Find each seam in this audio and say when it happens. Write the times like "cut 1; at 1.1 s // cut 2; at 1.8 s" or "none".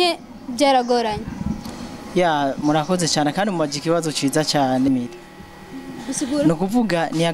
cut 1; at 4.9 s